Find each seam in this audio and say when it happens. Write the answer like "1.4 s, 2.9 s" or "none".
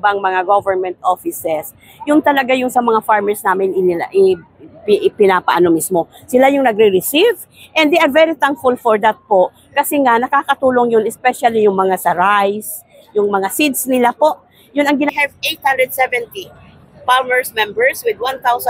15.1 s